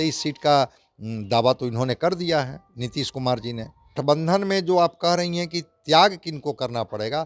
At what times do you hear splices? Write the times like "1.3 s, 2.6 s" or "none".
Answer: 4.0 s